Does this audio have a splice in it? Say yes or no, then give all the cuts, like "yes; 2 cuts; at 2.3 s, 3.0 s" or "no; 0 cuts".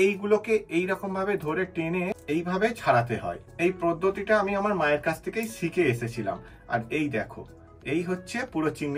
yes; 2 cuts; at 2.2 s, 3.5 s